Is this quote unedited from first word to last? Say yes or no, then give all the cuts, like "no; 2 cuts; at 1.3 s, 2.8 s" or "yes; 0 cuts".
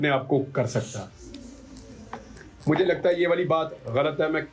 yes; 0 cuts